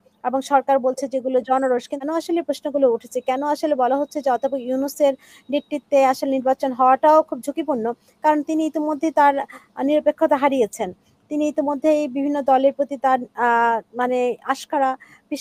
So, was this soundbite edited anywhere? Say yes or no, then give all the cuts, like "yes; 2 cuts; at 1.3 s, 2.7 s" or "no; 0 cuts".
yes; 1 cut; at 2.1 s